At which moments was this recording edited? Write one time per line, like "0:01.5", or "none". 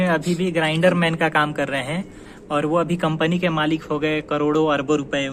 none